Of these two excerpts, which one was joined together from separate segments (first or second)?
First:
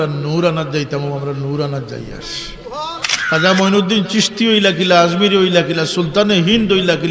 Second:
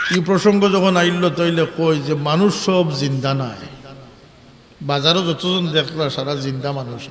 first